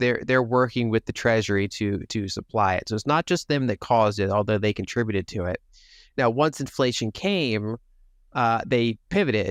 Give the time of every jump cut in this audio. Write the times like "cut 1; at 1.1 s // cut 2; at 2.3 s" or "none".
none